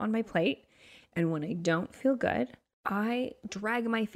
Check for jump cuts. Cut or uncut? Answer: cut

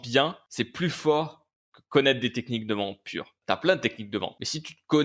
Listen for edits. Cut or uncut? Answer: uncut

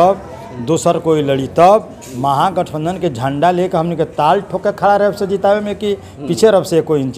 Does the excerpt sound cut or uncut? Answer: uncut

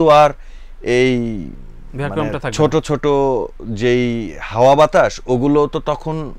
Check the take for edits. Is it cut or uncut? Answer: uncut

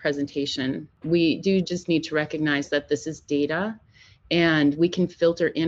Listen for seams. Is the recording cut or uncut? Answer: cut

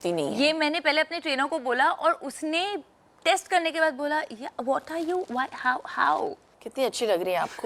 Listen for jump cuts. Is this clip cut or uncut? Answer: cut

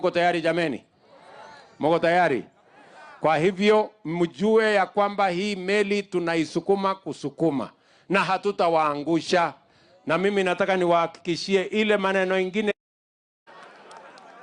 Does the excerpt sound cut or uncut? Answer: uncut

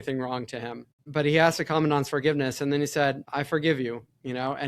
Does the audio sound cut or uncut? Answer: cut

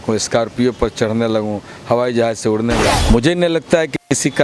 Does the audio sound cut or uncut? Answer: cut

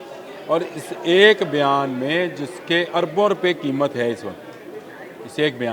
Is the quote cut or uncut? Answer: uncut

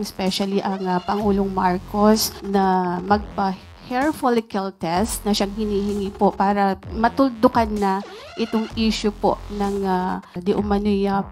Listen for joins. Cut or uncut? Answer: uncut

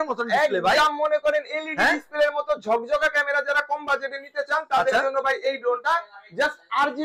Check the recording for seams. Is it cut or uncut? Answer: uncut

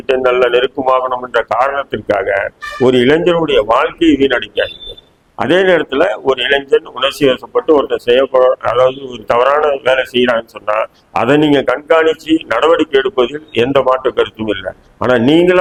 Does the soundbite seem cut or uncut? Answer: uncut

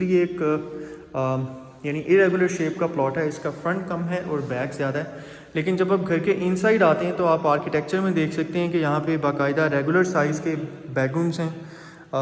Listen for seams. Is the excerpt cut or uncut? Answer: uncut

